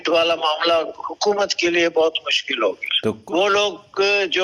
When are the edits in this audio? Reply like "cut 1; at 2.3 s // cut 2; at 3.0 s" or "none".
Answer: cut 1; at 3.2 s